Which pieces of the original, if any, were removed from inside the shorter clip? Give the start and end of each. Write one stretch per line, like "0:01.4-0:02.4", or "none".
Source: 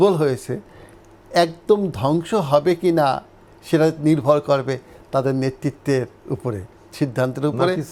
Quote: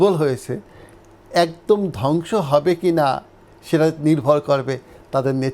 none